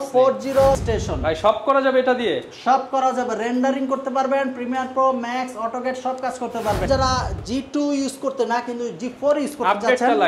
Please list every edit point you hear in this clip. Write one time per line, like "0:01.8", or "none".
0:00.8
0:06.9